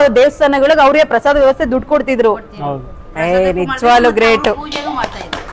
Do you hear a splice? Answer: no; 0 cuts

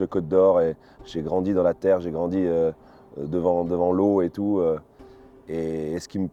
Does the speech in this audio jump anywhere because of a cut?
no; 0 cuts

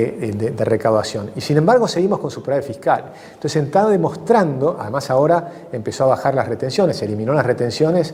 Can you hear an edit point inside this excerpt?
no; 0 cuts

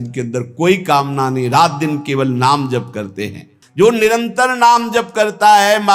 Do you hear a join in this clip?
yes; 1 cut; at 3.5 s

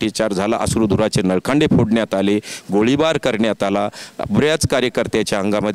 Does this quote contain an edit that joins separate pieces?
no; 0 cuts

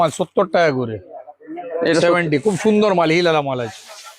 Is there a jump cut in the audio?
no; 0 cuts

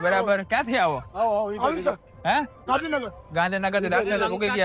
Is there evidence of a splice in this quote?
no; 0 cuts

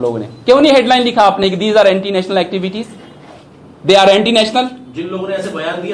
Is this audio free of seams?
yes; 0 cuts

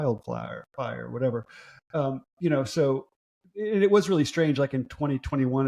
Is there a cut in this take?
no; 0 cuts

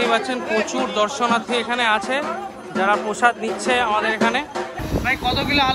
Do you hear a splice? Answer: yes; 1 cut; at 4.8 s

